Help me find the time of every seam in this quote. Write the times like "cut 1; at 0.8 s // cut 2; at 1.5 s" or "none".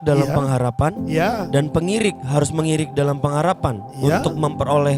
none